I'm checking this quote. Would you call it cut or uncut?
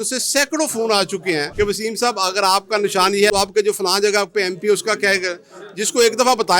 cut